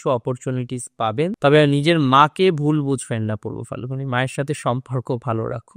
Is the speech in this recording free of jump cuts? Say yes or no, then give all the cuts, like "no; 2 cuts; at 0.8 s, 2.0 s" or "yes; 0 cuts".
no; 1 cut; at 1.4 s